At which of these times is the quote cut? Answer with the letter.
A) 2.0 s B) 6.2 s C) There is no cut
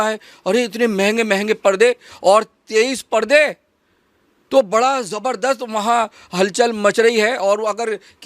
C